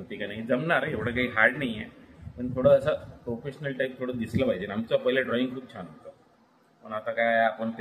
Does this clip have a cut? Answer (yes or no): no